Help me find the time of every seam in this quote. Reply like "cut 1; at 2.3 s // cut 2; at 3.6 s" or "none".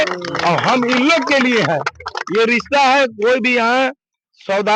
none